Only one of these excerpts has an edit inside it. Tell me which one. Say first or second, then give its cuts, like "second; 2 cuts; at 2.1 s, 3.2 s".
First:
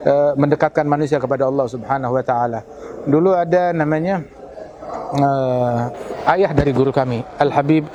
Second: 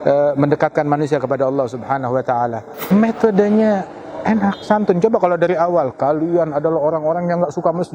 second; 1 cut; at 2.8 s